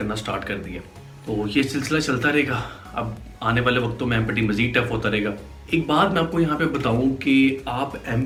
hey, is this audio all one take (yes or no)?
yes